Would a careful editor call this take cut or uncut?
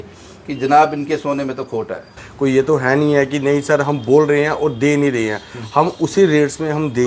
cut